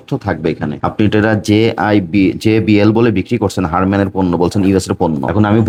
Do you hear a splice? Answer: no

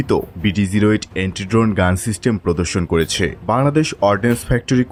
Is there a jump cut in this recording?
no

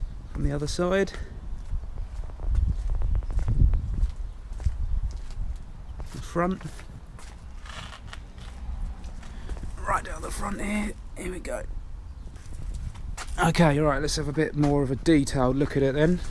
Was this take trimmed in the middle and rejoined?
yes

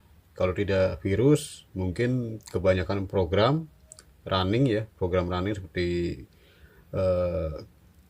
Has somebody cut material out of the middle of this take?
no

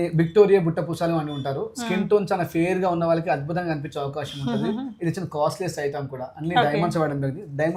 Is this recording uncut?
yes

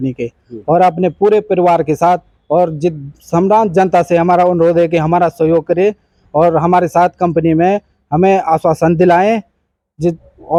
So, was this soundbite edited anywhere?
no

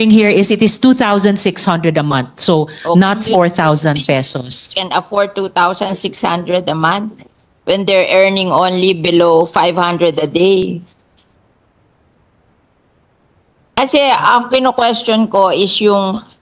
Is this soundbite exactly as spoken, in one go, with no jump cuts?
yes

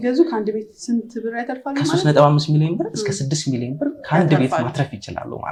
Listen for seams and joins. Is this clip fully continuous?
yes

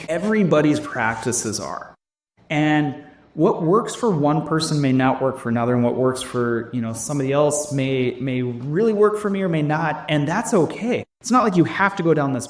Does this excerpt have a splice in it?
yes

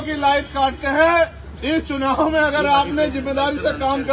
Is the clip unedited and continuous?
no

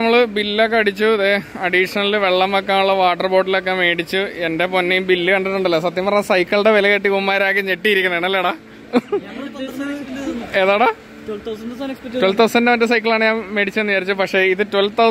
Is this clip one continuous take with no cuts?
yes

